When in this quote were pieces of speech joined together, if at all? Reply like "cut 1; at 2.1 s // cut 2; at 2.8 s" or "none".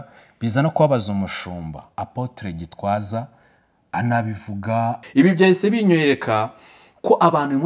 cut 1; at 5.0 s

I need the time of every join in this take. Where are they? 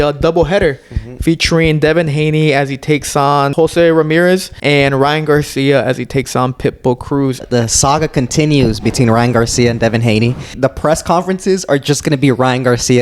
cut 1; at 3.5 s // cut 2; at 4.5 s // cut 3; at 7.4 s // cut 4; at 10.5 s

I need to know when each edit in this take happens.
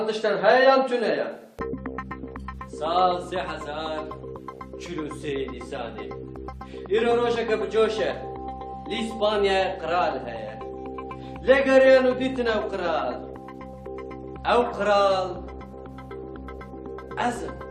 cut 1; at 1.1 s

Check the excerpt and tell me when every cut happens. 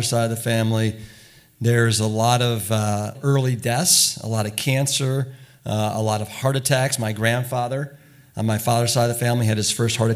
cut 1; at 3.2 s // cut 2; at 6.3 s

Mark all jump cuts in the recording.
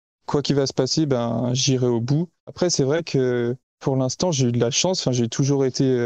cut 1; at 2.5 s // cut 2; at 3.7 s

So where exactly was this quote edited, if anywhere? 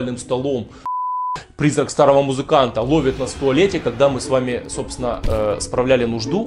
cut 1; at 1.2 s

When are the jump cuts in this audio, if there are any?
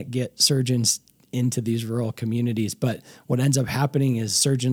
none

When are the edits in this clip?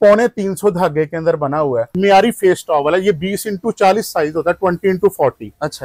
cut 1; at 1.9 s

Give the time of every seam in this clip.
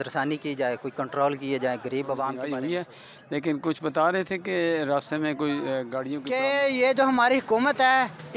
cut 1; at 2.4 s // cut 2; at 6.5 s

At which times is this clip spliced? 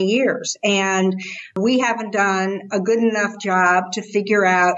cut 1; at 1.6 s

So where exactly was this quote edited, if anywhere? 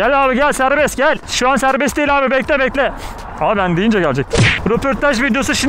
cut 1; at 1.2 s // cut 2; at 4.5 s

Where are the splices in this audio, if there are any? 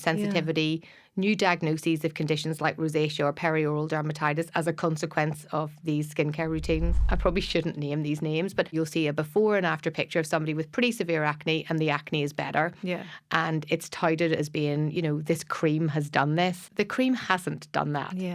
cut 1; at 7.1 s // cut 2; at 8.7 s // cut 3; at 16.7 s

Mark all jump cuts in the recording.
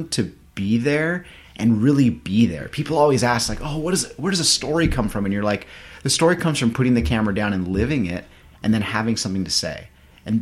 none

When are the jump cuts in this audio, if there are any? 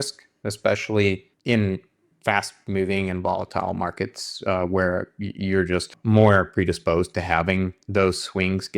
cut 1; at 1.3 s // cut 2; at 5.9 s

